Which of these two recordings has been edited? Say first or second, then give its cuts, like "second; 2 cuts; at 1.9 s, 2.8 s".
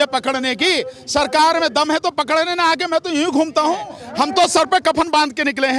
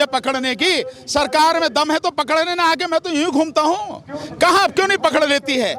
first; 1 cut; at 4.0 s